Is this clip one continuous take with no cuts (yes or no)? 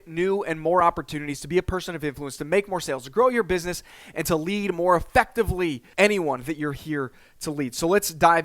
no